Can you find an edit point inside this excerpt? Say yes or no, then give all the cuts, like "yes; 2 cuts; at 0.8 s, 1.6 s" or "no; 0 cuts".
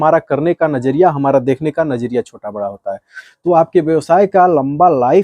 yes; 1 cut; at 3.1 s